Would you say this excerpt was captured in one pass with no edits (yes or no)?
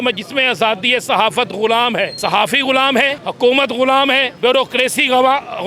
no